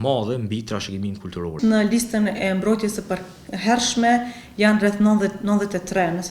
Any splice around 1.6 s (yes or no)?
yes